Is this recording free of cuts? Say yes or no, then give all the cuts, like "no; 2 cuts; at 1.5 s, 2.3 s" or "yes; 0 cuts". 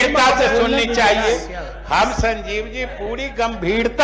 yes; 0 cuts